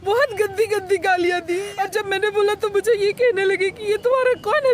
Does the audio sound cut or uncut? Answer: cut